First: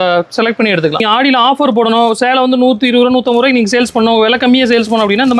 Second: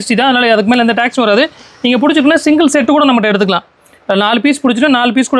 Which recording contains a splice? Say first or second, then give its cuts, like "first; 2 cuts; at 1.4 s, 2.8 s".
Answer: first; 1 cut; at 1.0 s